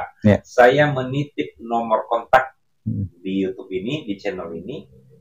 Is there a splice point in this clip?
no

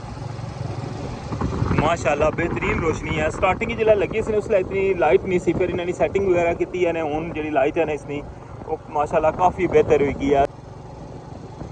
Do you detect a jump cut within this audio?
yes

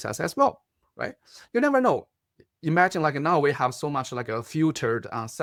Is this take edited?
no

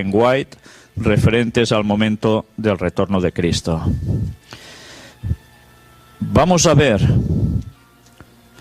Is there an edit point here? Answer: yes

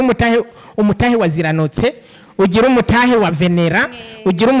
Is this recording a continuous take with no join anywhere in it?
yes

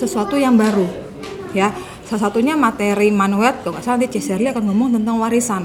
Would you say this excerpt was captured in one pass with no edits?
yes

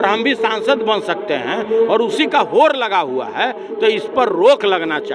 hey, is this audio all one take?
yes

